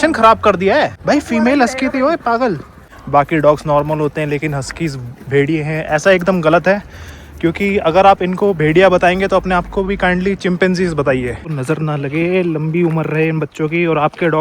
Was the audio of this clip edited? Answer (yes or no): yes